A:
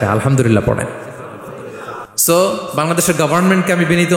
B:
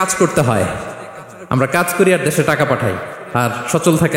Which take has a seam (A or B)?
A